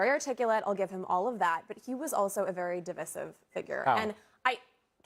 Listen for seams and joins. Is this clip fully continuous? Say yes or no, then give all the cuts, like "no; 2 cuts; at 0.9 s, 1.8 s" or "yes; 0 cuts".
yes; 0 cuts